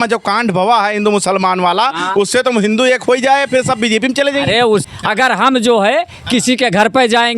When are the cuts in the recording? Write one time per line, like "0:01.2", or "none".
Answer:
0:04.8